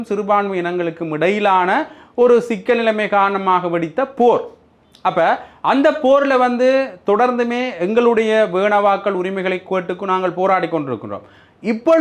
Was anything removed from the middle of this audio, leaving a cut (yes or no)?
no